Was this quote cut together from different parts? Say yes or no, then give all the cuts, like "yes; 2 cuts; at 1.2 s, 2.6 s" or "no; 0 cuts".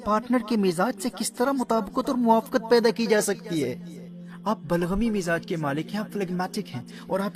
no; 0 cuts